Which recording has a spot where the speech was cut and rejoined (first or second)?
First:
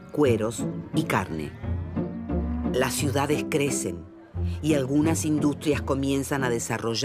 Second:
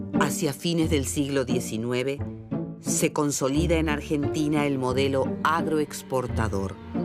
first